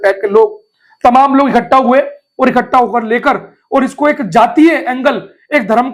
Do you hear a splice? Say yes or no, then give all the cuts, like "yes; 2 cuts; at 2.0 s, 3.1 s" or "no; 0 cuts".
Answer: no; 0 cuts